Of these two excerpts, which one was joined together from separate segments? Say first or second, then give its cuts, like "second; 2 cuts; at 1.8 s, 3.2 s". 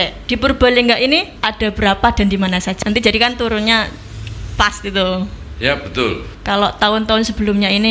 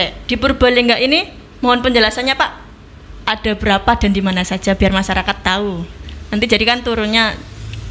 first; 3 cuts; at 1.4 s, 2.7 s, 6.3 s